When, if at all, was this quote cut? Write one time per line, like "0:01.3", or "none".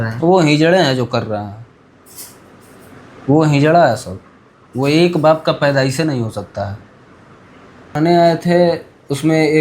0:08.0